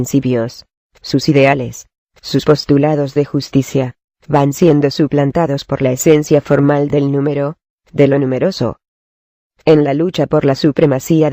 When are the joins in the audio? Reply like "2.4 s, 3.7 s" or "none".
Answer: 8.3 s